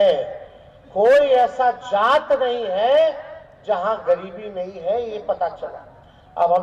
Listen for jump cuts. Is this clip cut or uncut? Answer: uncut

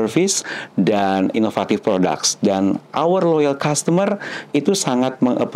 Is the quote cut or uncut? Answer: uncut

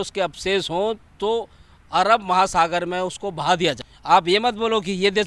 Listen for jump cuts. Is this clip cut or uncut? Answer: cut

